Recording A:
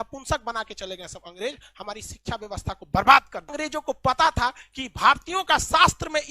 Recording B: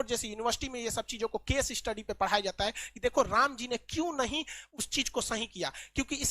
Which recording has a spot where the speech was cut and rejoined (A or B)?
A